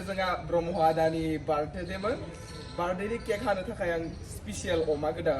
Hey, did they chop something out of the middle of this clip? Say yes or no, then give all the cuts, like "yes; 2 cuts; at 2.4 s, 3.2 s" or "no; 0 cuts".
no; 0 cuts